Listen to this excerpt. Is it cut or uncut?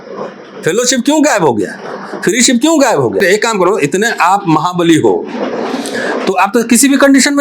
cut